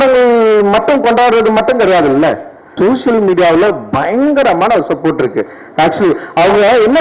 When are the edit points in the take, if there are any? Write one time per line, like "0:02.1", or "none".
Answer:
0:02.7